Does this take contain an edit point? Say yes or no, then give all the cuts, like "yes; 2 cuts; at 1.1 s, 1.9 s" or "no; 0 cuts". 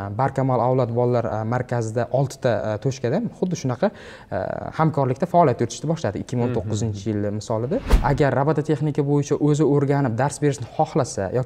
yes; 1 cut; at 7.9 s